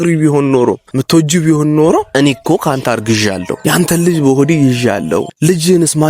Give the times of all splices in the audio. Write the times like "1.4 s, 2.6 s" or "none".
0.9 s, 2.1 s, 3.5 s, 5.3 s